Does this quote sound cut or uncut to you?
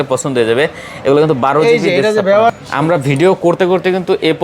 cut